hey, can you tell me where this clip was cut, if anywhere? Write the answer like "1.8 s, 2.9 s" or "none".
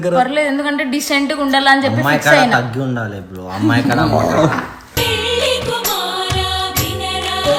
none